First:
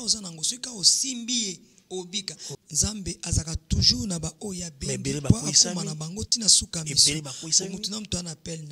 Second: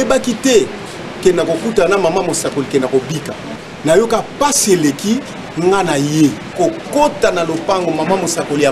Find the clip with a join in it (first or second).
first